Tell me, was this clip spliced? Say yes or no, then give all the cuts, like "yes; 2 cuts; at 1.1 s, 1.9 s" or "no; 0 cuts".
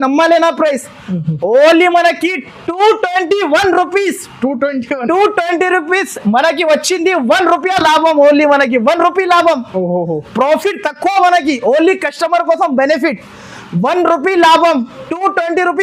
no; 0 cuts